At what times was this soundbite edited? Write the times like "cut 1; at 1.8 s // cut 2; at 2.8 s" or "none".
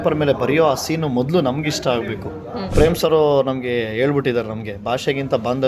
cut 1; at 2.7 s